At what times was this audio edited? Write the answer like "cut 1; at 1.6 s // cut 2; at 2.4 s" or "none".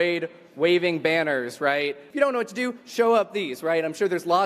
cut 1; at 2.0 s